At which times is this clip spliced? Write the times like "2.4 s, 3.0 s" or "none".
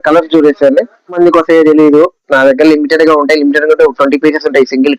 1.2 s